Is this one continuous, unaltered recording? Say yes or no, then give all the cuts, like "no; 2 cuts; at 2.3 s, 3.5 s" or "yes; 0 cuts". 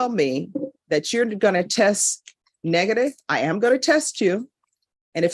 yes; 0 cuts